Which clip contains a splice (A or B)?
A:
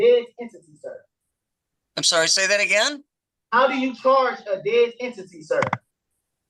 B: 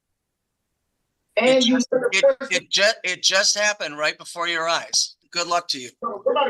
B